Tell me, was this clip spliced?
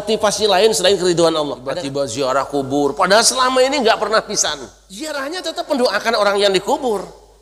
yes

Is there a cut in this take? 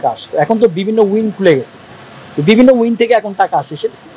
no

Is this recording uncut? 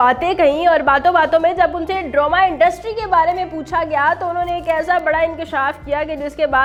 yes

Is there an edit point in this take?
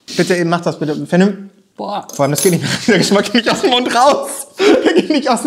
yes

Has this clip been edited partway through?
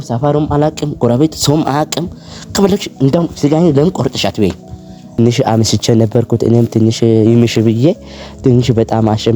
yes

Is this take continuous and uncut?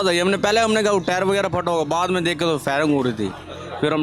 yes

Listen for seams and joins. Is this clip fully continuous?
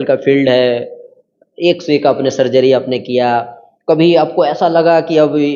yes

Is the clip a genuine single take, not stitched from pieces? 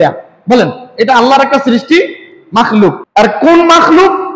yes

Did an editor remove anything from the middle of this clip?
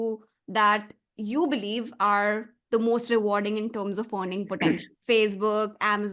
yes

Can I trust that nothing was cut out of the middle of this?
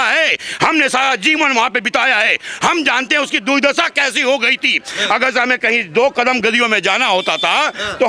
yes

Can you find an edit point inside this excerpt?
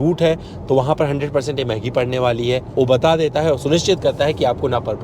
yes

